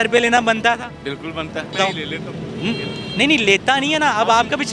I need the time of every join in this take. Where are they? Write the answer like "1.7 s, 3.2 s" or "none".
1.7 s